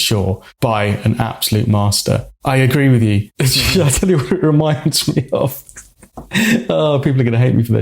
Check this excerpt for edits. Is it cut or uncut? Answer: cut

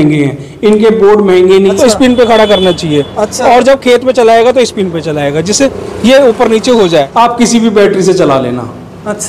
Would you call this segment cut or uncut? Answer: cut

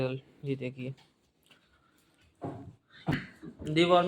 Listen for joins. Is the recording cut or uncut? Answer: cut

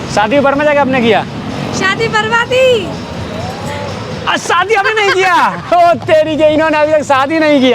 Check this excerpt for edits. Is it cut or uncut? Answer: uncut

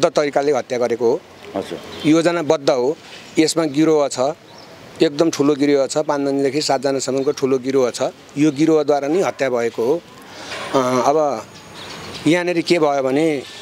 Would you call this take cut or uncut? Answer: uncut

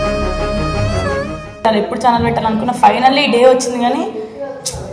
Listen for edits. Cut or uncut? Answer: cut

